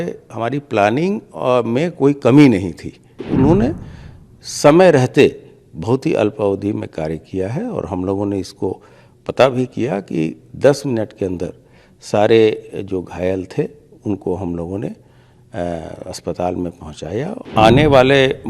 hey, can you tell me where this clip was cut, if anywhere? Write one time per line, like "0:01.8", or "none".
0:03.1
0:17.4